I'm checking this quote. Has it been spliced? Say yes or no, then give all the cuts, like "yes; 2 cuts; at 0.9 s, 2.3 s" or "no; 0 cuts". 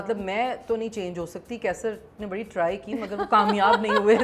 no; 0 cuts